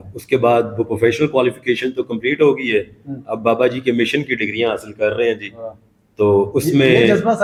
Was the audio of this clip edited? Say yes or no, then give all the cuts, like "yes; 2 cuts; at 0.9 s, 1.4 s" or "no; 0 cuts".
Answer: no; 0 cuts